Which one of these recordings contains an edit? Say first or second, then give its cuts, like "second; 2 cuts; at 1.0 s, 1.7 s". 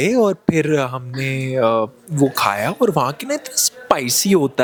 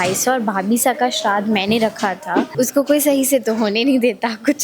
second; 1 cut; at 2.4 s